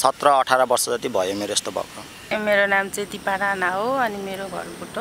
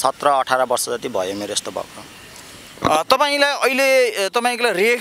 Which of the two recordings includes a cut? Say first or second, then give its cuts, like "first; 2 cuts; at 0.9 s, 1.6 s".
first; 1 cut; at 2.3 s